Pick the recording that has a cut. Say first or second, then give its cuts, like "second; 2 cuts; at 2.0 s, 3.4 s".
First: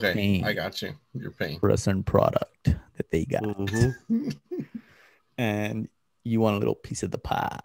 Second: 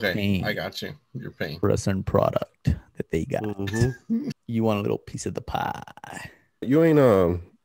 second; 2 cuts; at 4.4 s, 6.7 s